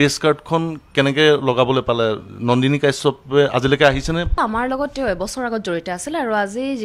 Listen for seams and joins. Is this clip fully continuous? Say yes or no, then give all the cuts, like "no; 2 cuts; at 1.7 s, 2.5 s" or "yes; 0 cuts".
no; 1 cut; at 4.4 s